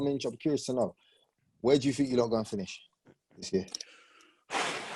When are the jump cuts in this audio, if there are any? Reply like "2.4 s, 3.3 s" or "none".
none